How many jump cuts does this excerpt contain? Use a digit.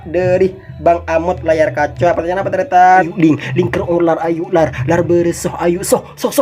1